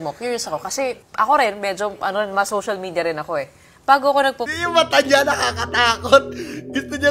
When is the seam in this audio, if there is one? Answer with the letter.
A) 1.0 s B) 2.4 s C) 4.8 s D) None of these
A